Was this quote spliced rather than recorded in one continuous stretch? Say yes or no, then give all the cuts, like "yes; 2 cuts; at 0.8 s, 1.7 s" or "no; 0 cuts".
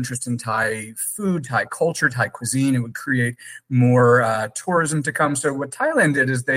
no; 0 cuts